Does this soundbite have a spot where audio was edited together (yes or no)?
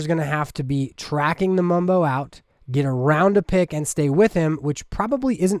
no